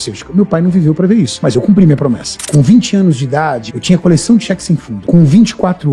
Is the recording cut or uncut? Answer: cut